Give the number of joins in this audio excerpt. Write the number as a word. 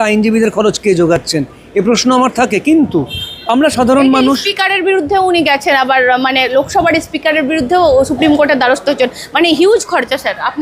zero